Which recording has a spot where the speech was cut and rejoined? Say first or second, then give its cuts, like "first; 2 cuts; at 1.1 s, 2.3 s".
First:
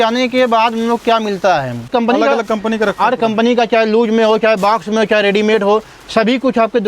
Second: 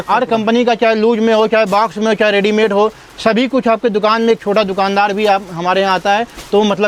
first; 1 cut; at 1.9 s